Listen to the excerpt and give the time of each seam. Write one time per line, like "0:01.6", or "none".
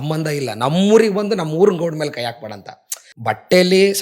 0:03.0